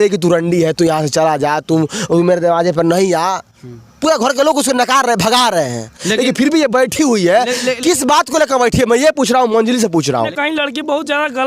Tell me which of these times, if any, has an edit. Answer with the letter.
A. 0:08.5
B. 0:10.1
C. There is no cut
B